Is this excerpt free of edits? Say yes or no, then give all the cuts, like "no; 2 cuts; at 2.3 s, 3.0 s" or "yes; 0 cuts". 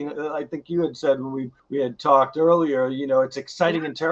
no; 1 cut; at 1.5 s